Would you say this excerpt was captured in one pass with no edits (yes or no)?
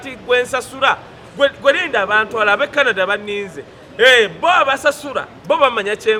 yes